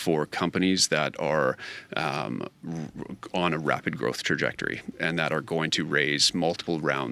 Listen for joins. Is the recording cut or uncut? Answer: uncut